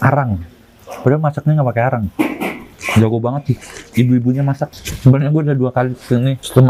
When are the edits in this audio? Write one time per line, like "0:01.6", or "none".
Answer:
none